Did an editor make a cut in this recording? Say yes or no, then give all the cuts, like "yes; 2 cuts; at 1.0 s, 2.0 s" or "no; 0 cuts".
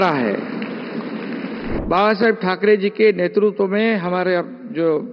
yes; 1 cut; at 1.8 s